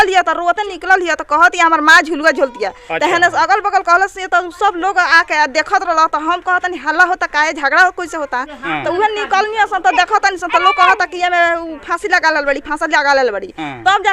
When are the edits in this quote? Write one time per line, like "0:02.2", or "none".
none